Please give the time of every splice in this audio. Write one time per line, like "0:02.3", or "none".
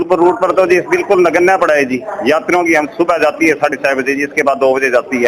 none